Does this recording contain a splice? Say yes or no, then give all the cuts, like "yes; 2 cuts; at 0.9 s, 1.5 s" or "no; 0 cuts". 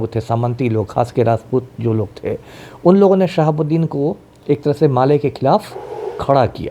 no; 0 cuts